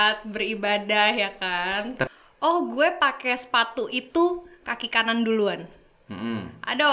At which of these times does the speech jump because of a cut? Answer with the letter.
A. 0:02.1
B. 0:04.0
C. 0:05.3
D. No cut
A